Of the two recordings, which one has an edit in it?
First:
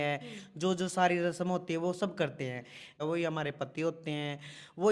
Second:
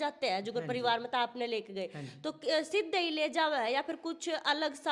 first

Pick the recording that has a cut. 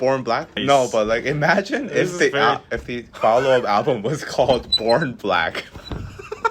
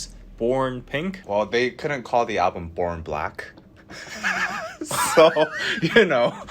second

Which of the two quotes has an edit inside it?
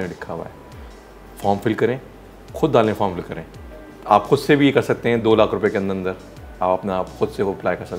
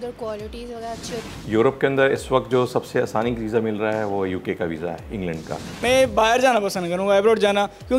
second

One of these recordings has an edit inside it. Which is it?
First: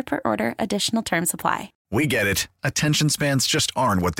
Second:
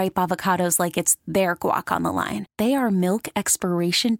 first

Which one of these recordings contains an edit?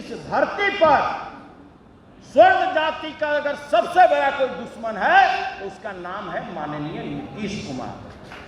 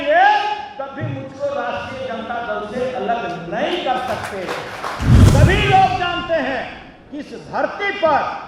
second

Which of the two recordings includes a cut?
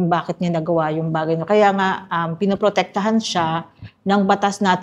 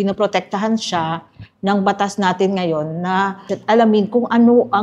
second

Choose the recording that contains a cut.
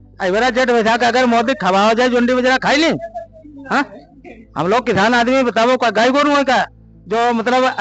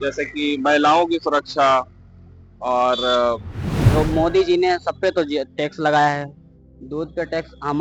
second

